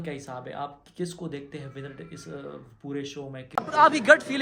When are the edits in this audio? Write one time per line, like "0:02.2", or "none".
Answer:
0:03.4